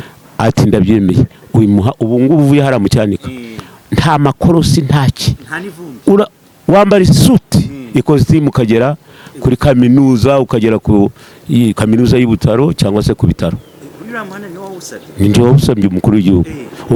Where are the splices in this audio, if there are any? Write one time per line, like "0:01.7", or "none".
none